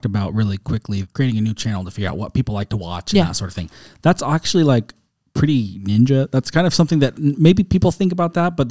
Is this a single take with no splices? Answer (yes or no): no